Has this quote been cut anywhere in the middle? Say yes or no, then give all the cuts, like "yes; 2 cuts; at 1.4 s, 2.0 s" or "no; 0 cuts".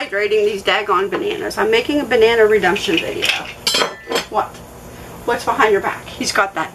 no; 0 cuts